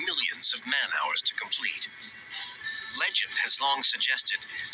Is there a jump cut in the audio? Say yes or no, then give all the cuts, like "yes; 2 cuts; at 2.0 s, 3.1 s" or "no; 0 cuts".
yes; 1 cut; at 3.3 s